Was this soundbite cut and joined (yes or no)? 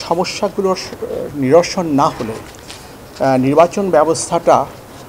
no